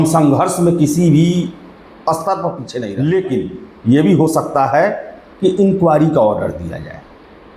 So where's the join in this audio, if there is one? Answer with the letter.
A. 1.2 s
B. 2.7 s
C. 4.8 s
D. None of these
B